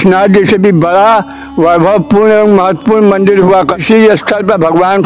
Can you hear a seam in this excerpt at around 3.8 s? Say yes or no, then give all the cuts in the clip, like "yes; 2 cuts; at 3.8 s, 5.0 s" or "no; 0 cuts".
yes; 1 cut; at 3.8 s